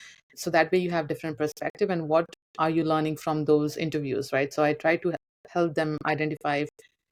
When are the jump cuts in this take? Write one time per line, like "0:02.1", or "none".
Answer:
none